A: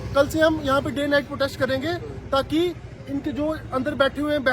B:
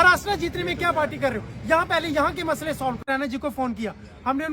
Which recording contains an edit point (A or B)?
B